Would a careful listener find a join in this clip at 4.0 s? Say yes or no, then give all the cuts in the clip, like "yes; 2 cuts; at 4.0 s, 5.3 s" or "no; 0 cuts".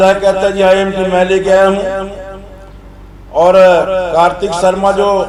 no; 0 cuts